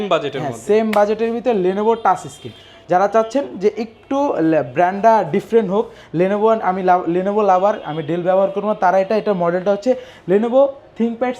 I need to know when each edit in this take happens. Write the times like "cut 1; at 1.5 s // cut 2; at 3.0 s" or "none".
none